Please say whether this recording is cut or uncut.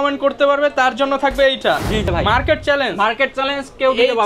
cut